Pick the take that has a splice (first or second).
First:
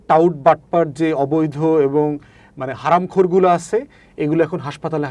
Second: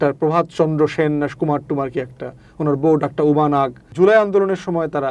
second